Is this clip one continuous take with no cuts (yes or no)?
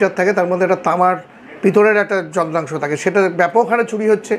yes